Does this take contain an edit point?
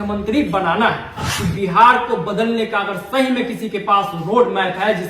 yes; 1 cut; at 1.3 s

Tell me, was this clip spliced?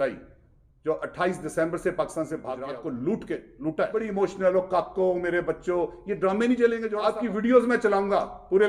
yes; 3 cuts; at 2.5 s, 3.9 s, 7.1 s

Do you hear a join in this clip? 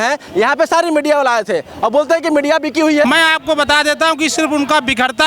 yes; 1 cut; at 3.0 s

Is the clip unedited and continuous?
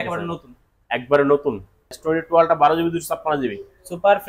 no; 1 cut; at 2.0 s

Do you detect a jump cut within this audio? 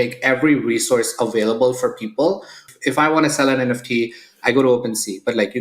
yes; 1 cut; at 2.7 s

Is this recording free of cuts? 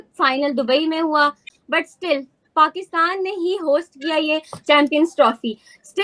no; 1 cut; at 1.5 s

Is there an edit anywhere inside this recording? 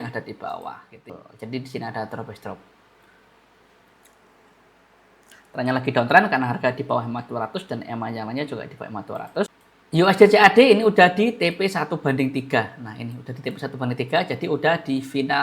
yes; 2 cuts; at 1.1 s, 9.7 s

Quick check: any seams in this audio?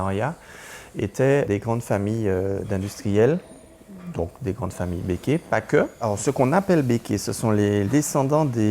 yes; 3 cuts; at 1.4 s, 6.0 s, 7.9 s

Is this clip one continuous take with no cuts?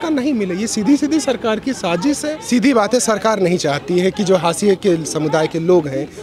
no; 1 cut; at 2.3 s

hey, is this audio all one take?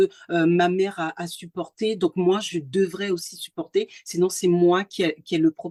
yes; 0 cuts

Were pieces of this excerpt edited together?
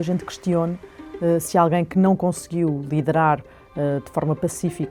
no; 0 cuts

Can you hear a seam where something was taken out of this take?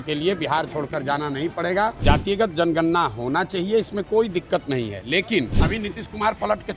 yes; 2 cuts; at 2.0 s, 5.6 s

